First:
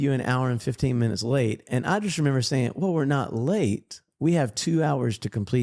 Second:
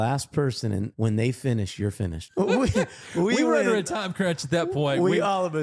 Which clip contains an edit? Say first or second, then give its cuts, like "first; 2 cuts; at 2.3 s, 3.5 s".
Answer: second; 2 cuts; at 0.9 s, 2.1 s